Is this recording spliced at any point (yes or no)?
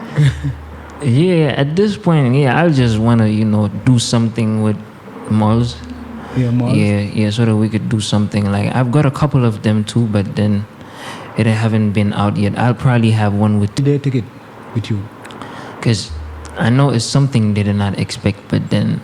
yes